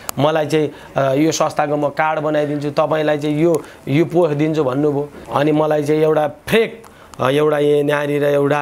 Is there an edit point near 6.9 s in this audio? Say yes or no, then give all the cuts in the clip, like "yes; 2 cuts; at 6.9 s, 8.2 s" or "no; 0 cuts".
no; 1 cut; at 5.2 s